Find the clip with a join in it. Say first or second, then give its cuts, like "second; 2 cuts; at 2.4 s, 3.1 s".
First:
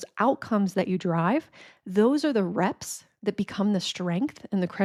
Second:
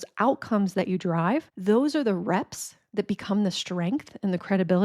second; 1 cut; at 1.5 s